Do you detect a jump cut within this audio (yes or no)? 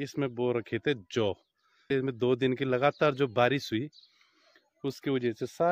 yes